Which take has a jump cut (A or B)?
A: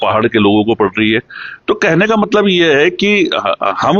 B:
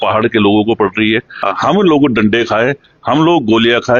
B